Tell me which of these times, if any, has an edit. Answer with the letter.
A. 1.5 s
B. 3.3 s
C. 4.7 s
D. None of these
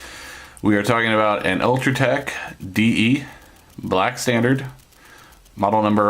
B